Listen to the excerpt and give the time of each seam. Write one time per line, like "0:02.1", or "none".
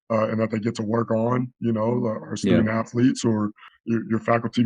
0:03.6